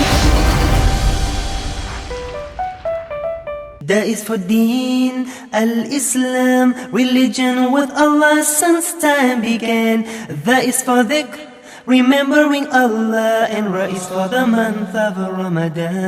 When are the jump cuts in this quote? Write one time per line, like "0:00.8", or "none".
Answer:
0:03.8